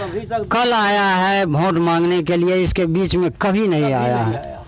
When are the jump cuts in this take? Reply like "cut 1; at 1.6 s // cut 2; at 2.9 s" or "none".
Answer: none